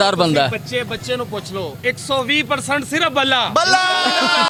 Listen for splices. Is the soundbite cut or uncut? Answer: uncut